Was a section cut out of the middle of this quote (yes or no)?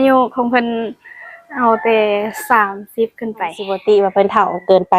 yes